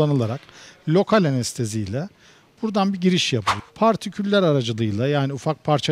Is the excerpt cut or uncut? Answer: cut